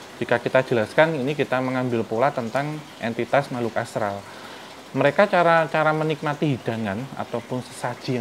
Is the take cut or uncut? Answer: uncut